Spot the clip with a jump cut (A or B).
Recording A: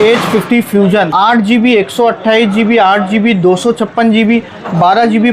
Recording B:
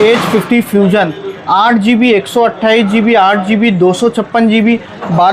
A